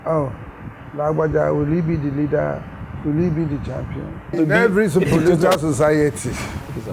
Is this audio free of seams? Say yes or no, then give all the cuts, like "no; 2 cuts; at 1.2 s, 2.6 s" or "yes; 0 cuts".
no; 1 cut; at 4.4 s